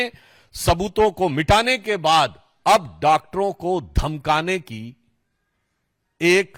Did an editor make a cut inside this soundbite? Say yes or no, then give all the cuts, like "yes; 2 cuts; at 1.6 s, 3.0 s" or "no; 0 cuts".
no; 0 cuts